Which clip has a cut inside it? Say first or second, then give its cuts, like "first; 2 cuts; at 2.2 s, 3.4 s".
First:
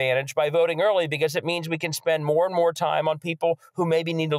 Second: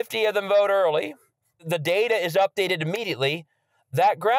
second; 1 cut; at 1.5 s